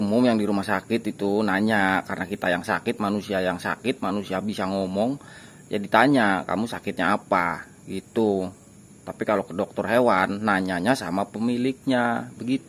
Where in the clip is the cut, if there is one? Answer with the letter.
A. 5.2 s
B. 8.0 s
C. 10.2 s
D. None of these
D